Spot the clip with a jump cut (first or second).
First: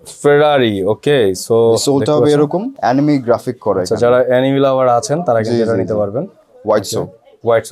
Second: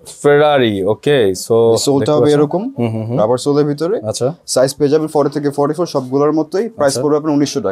first